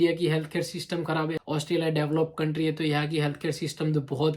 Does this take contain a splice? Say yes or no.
yes